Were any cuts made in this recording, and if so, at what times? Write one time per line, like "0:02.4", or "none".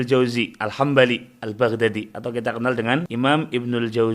0:03.1